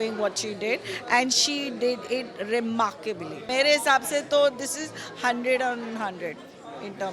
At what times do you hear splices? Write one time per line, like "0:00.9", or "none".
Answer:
0:03.5